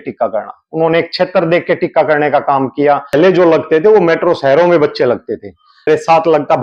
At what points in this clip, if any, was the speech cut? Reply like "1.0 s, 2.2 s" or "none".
3.1 s, 5.9 s